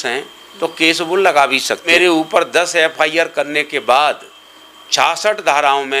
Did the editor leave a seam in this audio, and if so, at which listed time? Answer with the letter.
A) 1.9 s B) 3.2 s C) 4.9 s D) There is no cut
A